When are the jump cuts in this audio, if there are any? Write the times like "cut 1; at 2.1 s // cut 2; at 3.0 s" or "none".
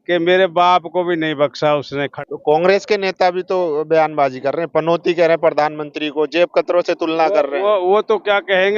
cut 1; at 2.1 s